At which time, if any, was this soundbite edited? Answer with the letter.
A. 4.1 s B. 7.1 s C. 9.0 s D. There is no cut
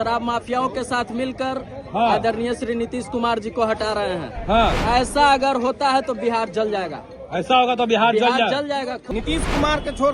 C